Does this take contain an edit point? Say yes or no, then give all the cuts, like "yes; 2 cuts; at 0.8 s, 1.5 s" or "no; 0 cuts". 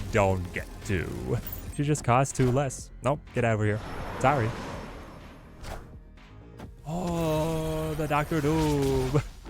yes; 1 cut; at 1.6 s